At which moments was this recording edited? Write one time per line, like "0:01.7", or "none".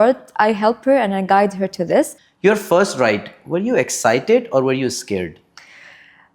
0:02.2